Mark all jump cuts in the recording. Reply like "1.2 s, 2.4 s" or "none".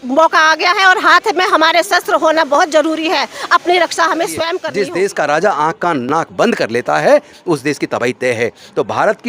4.6 s